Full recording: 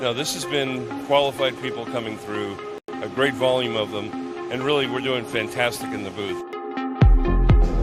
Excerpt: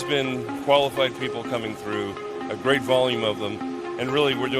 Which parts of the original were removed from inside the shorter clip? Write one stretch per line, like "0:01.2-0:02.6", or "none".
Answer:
0:02.7-0:02.8